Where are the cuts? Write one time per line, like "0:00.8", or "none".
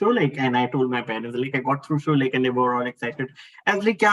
none